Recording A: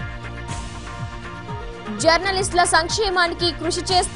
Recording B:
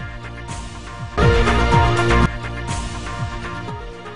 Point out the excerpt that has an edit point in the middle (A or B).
A